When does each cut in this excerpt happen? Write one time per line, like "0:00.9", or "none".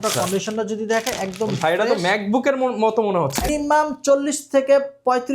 0:03.5